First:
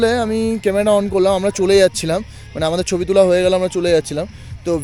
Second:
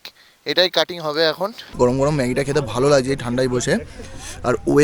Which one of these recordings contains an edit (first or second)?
second